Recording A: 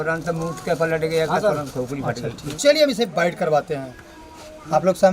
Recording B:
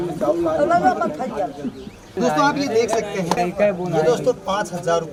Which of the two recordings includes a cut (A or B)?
A